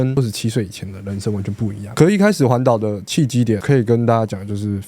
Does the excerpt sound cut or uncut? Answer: cut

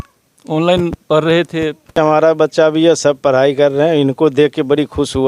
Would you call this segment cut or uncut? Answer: cut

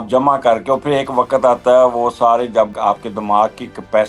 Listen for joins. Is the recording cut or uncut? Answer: cut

